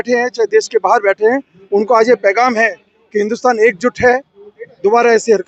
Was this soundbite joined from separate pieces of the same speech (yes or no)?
no